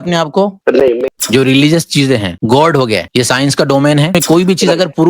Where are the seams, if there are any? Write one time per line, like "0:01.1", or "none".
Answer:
0:01.1
0:02.3
0:03.1
0:04.1